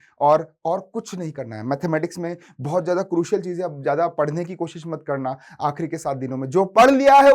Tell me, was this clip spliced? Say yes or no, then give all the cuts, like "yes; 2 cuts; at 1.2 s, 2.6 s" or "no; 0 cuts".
no; 0 cuts